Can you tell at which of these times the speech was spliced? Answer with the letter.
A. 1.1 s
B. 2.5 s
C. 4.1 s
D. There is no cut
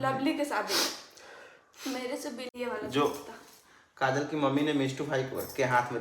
B